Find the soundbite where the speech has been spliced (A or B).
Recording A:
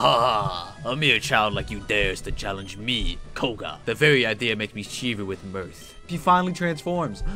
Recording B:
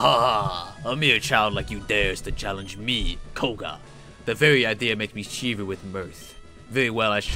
A